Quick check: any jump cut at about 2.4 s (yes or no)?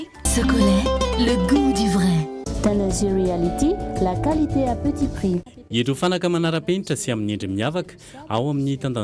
yes